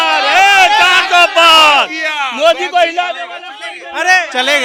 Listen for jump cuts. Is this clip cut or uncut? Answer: uncut